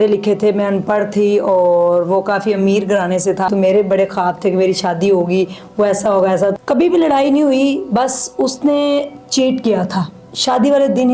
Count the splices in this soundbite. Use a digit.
3